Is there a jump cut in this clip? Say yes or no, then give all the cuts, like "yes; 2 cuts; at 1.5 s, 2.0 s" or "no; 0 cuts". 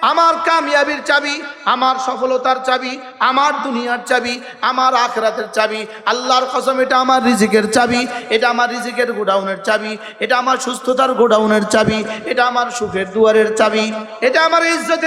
yes; 1 cut; at 14.0 s